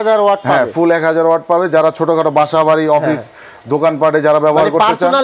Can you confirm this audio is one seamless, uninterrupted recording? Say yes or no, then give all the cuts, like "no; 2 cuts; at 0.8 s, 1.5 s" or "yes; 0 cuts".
yes; 0 cuts